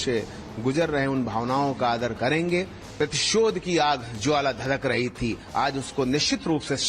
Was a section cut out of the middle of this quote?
yes; 1 cut; at 2.8 s

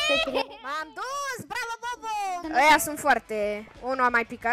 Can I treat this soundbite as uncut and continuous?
no; 1 cut; at 2.4 s

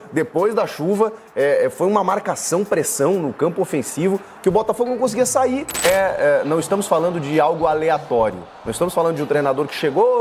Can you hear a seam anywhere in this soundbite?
yes; 1 cut; at 5.8 s

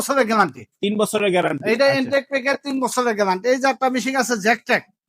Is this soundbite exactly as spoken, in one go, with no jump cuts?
yes; 0 cuts

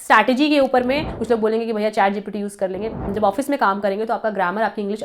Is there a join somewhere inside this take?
yes; 2 cuts; at 1.1 s, 3.1 s

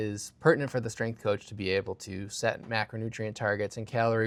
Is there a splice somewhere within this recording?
no; 0 cuts

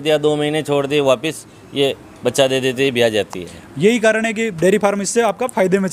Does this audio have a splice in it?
no; 0 cuts

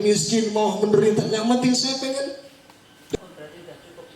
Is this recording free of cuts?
no; 1 cut; at 3.2 s

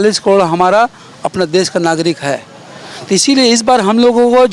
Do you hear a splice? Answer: no; 0 cuts

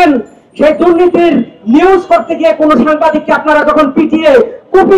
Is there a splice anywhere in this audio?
no; 0 cuts

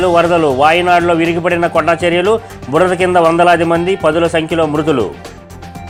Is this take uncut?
yes; 0 cuts

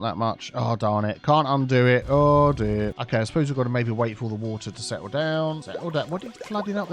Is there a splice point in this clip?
yes; 2 cuts; at 3.0 s, 5.7 s

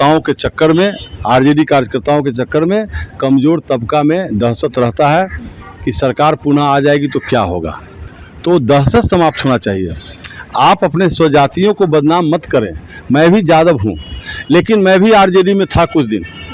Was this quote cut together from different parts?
no; 0 cuts

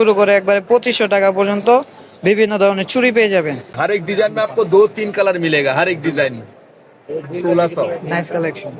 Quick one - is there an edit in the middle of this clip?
yes; 1 cut; at 3.8 s

